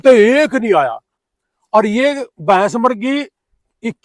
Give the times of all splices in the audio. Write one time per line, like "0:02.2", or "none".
none